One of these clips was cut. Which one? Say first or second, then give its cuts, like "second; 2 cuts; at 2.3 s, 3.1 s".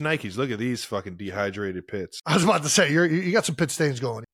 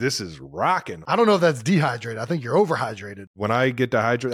second; 2 cuts; at 1.0 s, 3.1 s